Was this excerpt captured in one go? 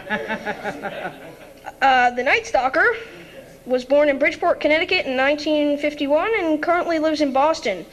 no; 1 cut; at 3.7 s

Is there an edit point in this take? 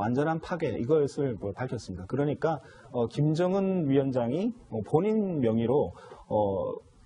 yes; 1 cut; at 4.9 s

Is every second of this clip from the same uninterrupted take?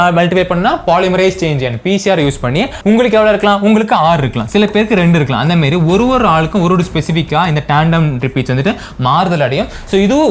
no; 1 cut; at 2.7 s

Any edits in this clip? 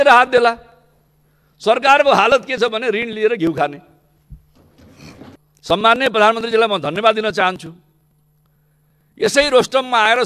yes; 1 cut; at 5.4 s

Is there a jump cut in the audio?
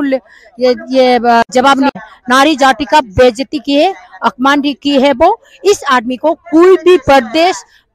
yes; 1 cut; at 1.9 s

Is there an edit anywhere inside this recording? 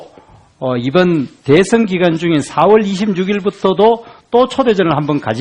yes; 1 cut; at 3.8 s

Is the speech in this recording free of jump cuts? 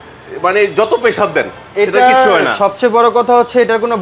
yes; 0 cuts

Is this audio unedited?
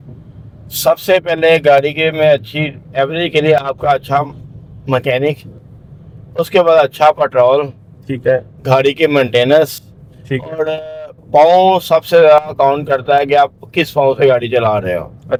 yes; 0 cuts

